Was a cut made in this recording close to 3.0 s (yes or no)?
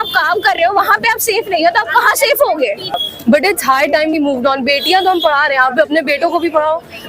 yes